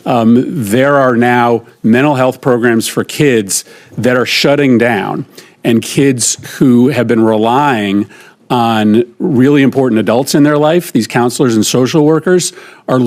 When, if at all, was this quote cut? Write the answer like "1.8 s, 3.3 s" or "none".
none